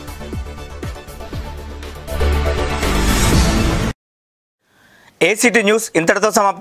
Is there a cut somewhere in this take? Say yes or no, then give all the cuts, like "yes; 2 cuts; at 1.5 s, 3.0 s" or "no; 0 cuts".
no; 0 cuts